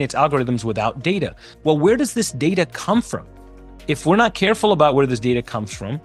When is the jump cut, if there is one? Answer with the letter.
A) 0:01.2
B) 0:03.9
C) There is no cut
C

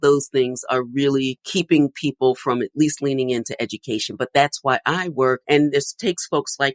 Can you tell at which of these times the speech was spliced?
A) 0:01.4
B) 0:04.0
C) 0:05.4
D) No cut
A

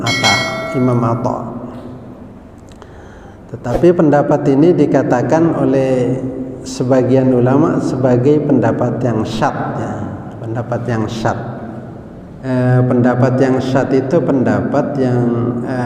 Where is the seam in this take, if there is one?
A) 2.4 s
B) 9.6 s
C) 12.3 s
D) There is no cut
C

